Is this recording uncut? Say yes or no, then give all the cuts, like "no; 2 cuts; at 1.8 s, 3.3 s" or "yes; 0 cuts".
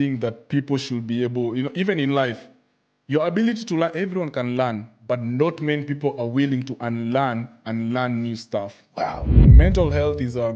no; 1 cut; at 9.4 s